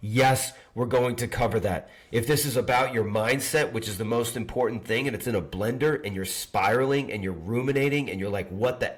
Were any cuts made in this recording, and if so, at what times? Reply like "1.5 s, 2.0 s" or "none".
none